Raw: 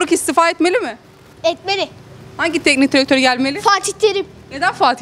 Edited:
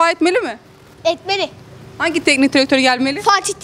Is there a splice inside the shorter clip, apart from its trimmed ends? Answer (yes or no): no